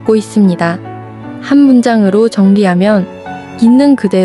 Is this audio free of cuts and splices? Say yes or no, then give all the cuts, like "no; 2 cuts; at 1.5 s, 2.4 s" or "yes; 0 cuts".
yes; 0 cuts